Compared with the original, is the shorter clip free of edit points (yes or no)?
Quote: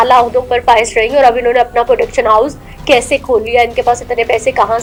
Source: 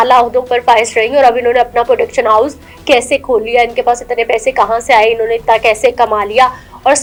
yes